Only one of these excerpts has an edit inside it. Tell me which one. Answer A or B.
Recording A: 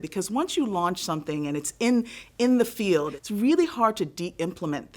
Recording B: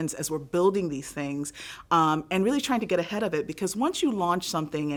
A